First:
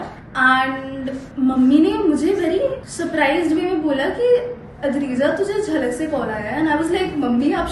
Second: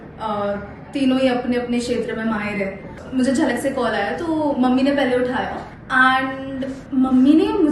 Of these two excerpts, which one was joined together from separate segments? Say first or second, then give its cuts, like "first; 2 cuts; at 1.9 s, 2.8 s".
second; 1 cut; at 3.0 s